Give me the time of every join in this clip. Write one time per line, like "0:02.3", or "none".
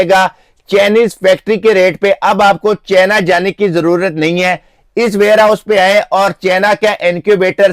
none